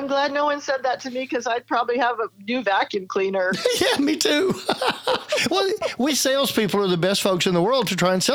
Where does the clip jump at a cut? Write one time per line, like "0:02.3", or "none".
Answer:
none